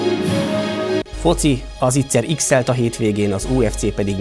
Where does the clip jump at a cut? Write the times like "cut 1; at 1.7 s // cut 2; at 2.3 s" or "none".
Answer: cut 1; at 1.0 s